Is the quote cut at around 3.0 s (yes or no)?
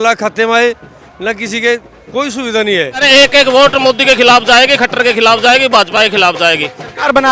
yes